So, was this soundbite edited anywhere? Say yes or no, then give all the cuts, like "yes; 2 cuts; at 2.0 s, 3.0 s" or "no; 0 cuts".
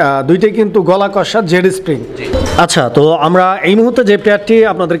yes; 1 cut; at 2.3 s